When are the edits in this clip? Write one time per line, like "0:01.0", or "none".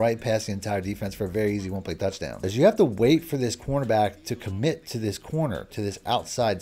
0:02.5